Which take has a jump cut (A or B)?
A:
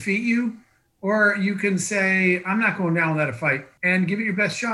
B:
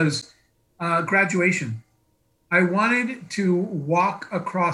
A